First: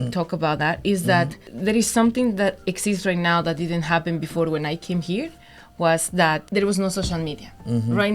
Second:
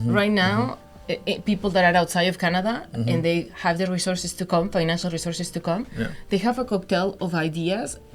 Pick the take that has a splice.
first; 2 cuts; at 1.4 s, 6.4 s

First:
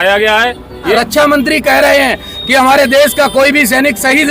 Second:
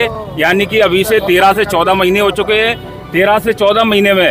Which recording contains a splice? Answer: first; 1 cut; at 0.9 s

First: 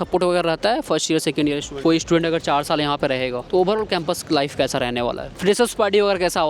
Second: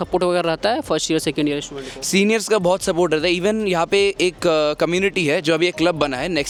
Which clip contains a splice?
first; 3 cuts; at 1.8 s, 3.4 s, 5.3 s

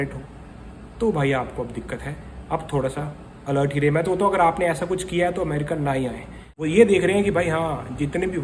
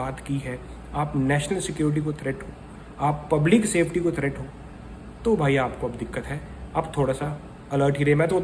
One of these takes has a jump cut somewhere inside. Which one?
first; 1 cut; at 6.6 s

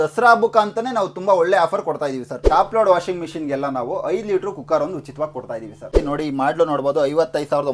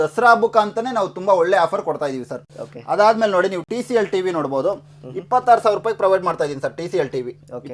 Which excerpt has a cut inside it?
first; 2 cuts; at 2.4 s, 5.9 s

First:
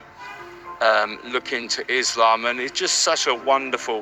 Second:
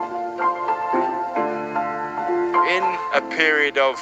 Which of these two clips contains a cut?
second; 1 cut; at 0.9 s

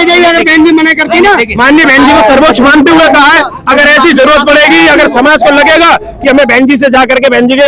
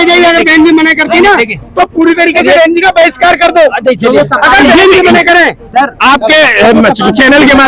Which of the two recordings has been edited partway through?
first; 1 cut; at 1.5 s

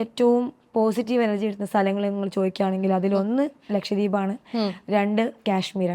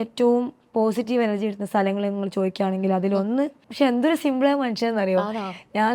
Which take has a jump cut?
second; 1 cut; at 3.6 s

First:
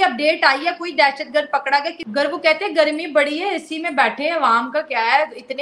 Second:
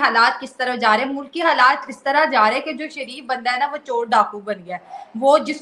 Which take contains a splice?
first; 1 cut; at 2.0 s

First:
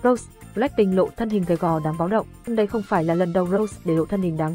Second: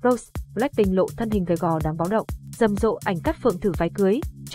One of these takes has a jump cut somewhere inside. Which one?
second; 1 cut; at 2.4 s

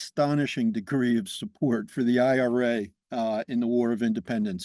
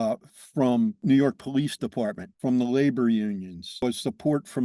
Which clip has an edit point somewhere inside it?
second; 3 cuts; at 1.0 s, 2.3 s, 3.8 s

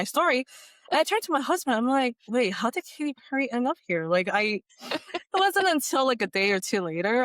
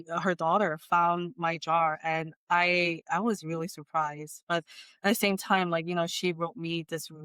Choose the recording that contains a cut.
first; 1 cut; at 4.7 s

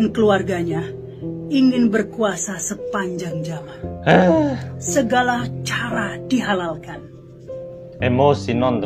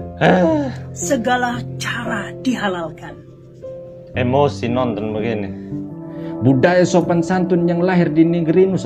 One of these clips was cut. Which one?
second; 1 cut; at 5.9 s

